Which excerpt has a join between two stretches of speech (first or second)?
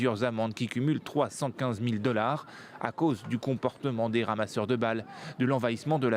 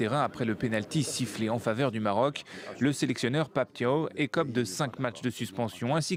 first